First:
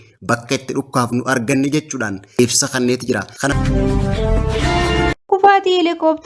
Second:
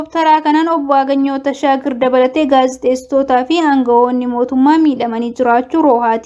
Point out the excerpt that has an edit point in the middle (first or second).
first